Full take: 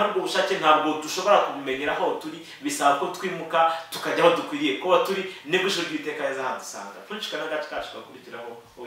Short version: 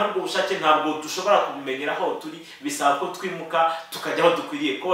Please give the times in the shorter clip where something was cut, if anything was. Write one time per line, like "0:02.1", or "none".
none